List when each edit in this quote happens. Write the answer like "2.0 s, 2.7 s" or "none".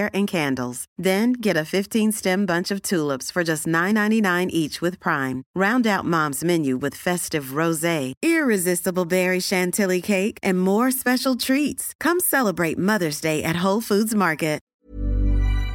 14.6 s